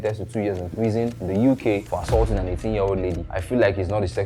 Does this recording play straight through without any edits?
no; 3 cuts; at 1.2 s, 1.9 s, 3.3 s

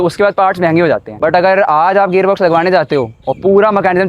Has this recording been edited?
yes; 1 cut; at 1.1 s

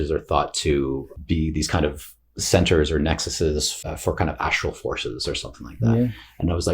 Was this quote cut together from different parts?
yes; 2 cuts; at 1.1 s, 3.7 s

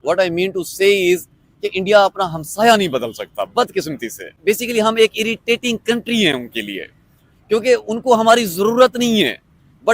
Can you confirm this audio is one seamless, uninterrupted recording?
no; 1 cut; at 4.3 s

